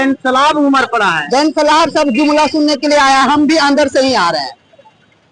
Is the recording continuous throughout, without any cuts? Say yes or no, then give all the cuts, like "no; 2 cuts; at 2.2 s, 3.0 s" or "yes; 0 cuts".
yes; 0 cuts